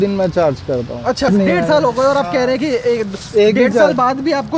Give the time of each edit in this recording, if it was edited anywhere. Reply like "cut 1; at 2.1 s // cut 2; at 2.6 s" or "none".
cut 1; at 1.3 s